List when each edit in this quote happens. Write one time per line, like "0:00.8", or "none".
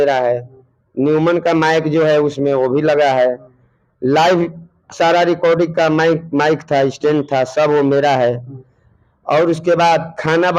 none